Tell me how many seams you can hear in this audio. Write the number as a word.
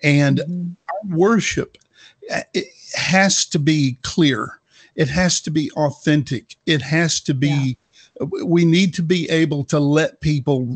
zero